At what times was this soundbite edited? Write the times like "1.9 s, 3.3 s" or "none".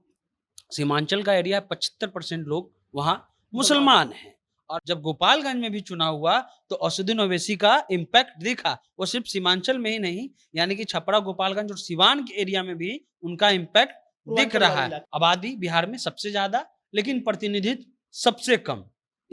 4.8 s, 15.0 s